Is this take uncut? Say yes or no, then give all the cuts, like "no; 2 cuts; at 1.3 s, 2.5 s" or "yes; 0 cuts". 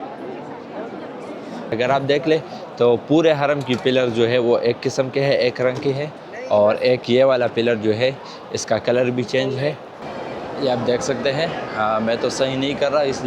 no; 2 cuts; at 1.7 s, 10.0 s